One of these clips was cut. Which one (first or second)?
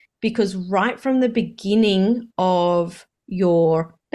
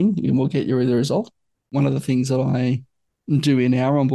second